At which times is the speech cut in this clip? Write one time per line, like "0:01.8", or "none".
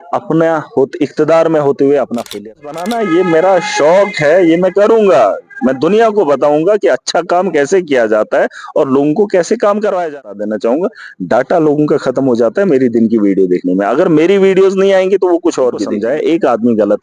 0:02.6
0:10.2
0:15.9